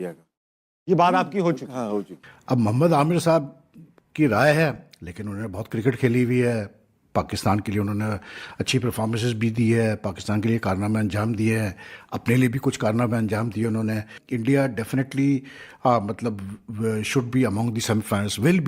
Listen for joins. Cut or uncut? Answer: cut